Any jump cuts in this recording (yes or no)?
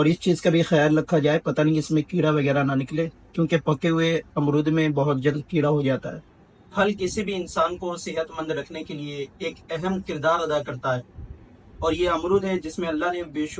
no